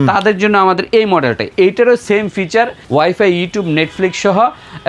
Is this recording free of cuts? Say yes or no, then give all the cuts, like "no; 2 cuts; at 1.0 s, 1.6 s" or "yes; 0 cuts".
no; 2 cuts; at 1.5 s, 2.8 s